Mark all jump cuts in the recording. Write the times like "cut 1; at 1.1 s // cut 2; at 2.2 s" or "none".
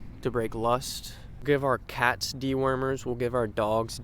cut 1; at 1.4 s